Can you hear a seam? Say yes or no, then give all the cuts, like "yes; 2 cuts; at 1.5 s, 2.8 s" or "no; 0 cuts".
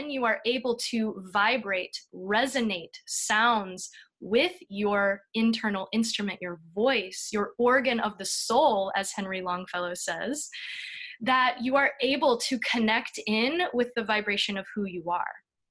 no; 0 cuts